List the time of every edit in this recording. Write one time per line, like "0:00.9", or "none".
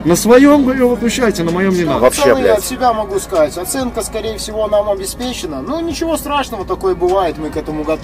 0:01.9